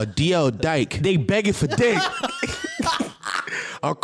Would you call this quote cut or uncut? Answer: cut